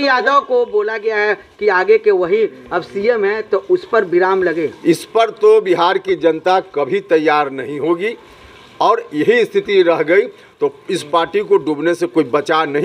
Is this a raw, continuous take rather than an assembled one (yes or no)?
yes